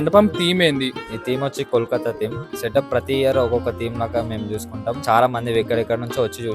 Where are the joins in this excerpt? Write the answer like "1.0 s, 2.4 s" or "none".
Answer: 1.1 s, 2.5 s, 5.0 s